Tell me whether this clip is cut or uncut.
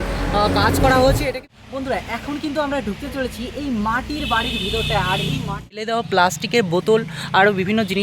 cut